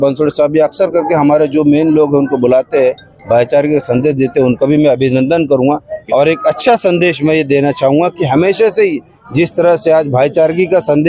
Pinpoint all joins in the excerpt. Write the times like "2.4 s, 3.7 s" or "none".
5.9 s